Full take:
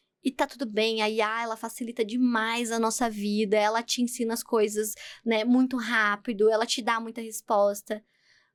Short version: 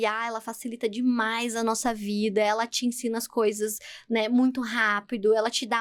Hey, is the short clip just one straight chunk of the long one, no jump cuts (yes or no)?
yes